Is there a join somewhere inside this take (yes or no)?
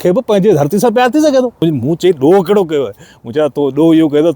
yes